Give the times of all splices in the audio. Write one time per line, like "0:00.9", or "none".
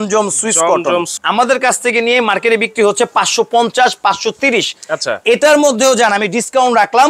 0:01.1